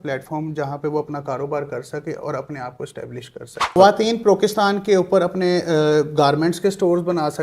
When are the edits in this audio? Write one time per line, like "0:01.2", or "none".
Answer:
0:03.8